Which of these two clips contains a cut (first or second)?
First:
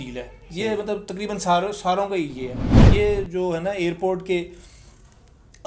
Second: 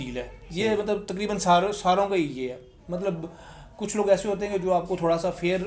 first